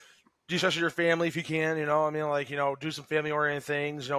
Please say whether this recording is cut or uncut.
uncut